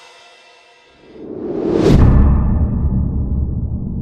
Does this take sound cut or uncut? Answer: cut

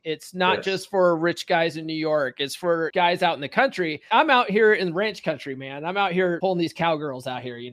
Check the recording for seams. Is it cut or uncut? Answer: cut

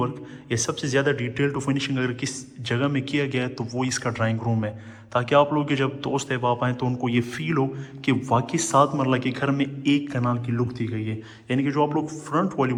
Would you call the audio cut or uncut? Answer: uncut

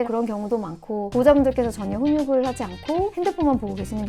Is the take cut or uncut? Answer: cut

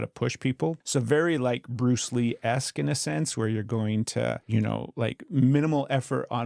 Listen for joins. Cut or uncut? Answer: cut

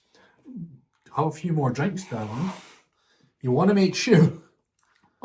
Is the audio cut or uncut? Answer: uncut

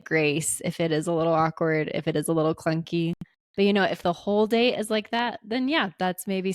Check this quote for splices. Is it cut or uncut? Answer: uncut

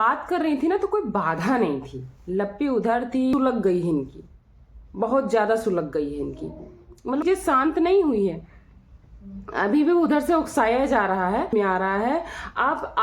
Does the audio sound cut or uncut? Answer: cut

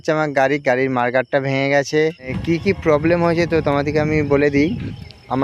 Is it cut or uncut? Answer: cut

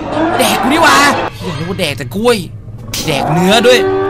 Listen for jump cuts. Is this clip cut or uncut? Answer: cut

